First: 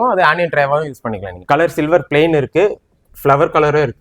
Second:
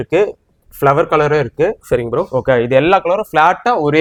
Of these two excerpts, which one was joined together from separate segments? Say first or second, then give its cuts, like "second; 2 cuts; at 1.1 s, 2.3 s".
first; 1 cut; at 1.4 s